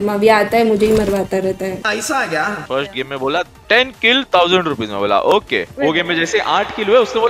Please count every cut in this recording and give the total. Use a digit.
2